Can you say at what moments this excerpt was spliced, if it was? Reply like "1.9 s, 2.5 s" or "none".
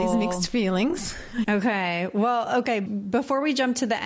1.5 s, 2.8 s